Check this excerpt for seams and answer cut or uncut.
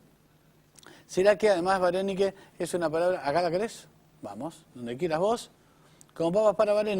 uncut